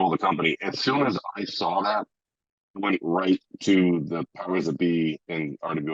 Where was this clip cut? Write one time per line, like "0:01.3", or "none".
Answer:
none